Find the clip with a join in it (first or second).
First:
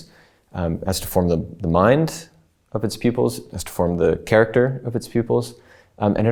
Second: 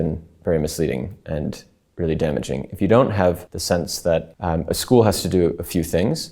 second